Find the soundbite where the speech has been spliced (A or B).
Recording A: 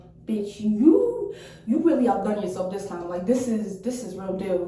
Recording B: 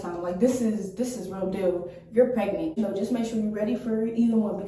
B